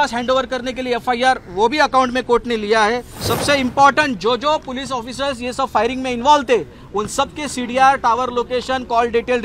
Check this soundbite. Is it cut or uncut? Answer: cut